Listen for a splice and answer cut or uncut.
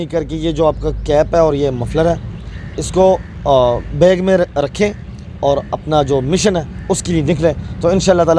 uncut